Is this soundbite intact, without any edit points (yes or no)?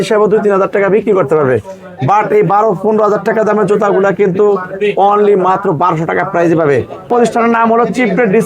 no